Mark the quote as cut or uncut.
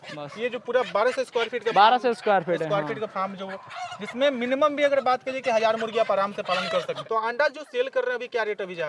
cut